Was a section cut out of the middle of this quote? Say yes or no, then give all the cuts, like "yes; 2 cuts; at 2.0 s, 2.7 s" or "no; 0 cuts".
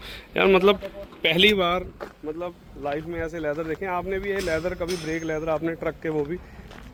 no; 0 cuts